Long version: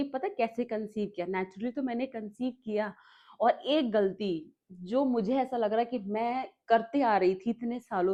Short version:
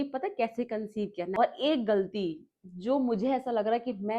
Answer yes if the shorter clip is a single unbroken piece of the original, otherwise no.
no